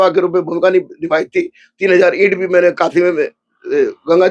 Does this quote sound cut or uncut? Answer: uncut